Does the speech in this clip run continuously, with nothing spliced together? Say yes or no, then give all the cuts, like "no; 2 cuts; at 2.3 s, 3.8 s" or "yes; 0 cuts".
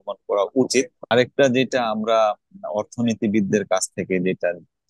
no; 1 cut; at 1.0 s